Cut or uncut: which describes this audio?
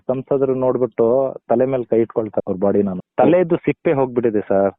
cut